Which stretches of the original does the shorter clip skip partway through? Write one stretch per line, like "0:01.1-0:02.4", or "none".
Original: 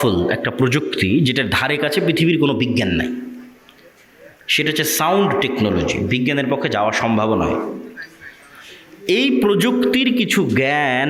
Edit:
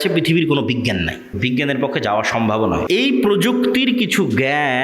0:03.3-0:06.0
0:07.5-0:09.0